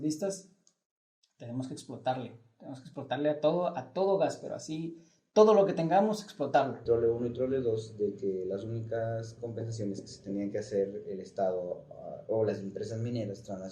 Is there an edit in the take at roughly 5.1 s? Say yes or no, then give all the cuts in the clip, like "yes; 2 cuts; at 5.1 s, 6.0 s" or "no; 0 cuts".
no; 1 cut; at 6.8 s